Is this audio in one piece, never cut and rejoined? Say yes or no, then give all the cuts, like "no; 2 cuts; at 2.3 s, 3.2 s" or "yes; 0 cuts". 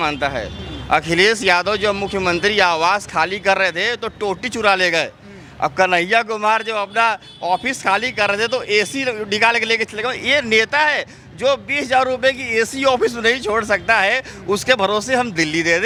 yes; 0 cuts